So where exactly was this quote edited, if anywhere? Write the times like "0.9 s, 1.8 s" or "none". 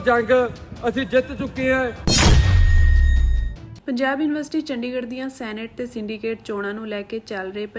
2.0 s